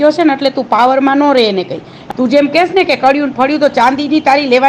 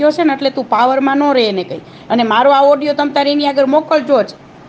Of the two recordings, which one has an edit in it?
first; 1 cut; at 1.9 s

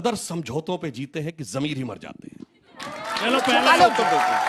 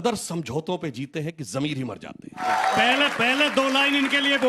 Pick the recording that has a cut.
second; 1 cut; at 2.4 s

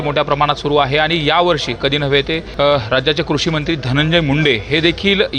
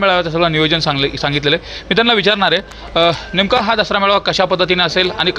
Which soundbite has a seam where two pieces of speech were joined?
first; 1 cut; at 2.5 s

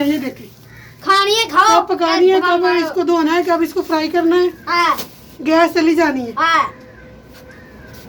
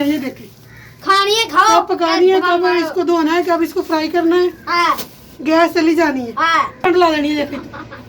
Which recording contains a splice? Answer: second; 1 cut; at 6.8 s

